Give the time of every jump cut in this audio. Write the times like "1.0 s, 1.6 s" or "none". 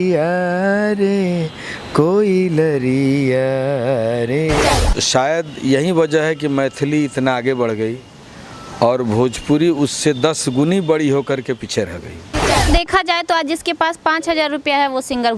4.8 s, 12.6 s